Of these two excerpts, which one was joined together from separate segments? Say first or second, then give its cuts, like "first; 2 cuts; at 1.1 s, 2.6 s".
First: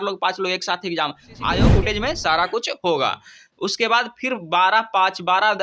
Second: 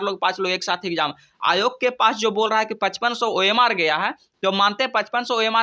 first; 1 cut; at 1.7 s